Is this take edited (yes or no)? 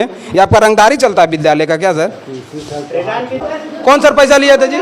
yes